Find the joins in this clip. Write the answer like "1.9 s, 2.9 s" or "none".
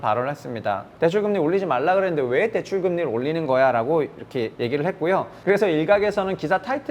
0.9 s, 5.1 s